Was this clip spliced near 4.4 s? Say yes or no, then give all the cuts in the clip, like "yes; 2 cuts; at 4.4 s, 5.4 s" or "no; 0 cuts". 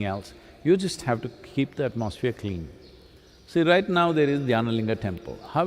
no; 0 cuts